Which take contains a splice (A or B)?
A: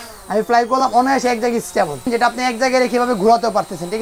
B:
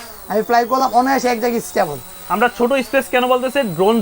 A